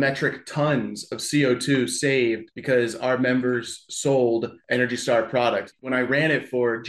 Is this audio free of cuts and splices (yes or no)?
no